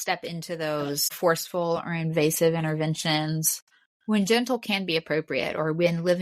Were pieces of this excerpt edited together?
yes; 1 cut; at 1.1 s

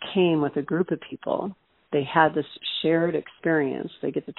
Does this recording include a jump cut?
no; 0 cuts

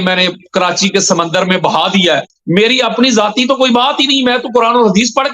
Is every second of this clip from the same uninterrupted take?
no; 1 cut; at 2.3 s

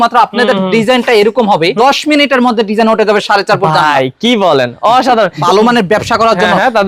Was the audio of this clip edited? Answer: yes; 2 cuts; at 1.7 s, 5.4 s

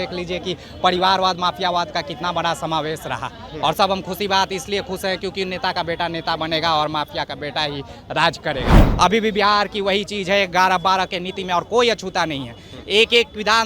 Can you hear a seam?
yes; 1 cut; at 8.8 s

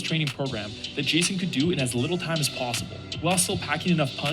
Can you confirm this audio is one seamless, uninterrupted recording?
no; 1 cut; at 2.9 s

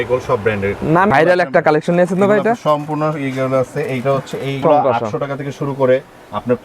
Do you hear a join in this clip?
yes; 2 cuts; at 1.1 s, 4.6 s

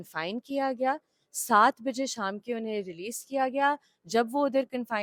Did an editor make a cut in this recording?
no; 0 cuts

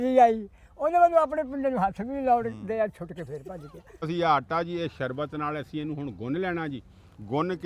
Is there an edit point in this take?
yes; 1 cut; at 4.0 s

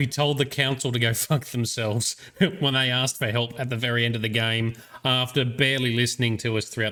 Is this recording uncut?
yes; 0 cuts

